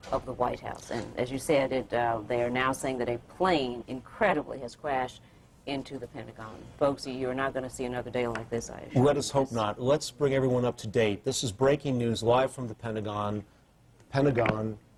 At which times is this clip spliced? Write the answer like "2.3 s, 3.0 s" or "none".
none